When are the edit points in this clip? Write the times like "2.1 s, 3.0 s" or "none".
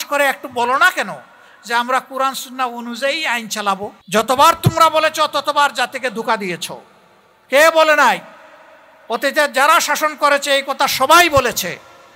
4.0 s

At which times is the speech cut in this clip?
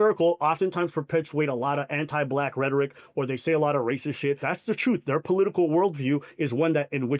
4.5 s

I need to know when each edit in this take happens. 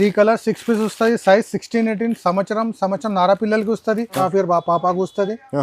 4.2 s

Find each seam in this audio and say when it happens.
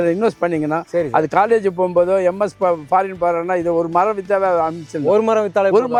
none

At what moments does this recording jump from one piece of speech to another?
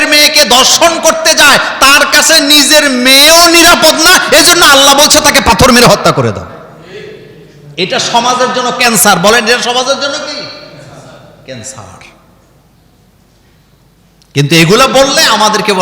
none

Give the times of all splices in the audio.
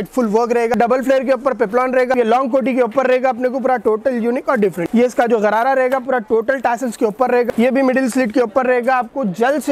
0.7 s, 2.1 s, 4.8 s, 7.5 s

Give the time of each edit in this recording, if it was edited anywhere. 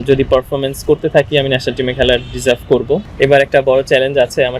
3.0 s

